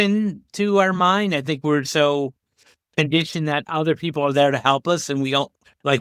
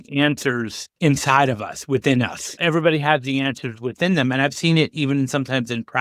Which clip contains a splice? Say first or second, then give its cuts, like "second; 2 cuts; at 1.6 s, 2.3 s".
second; 1 cut; at 2.6 s